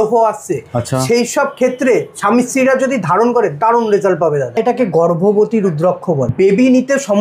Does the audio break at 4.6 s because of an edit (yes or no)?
yes